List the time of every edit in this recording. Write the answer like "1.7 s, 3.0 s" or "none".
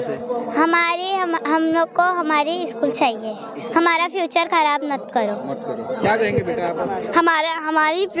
none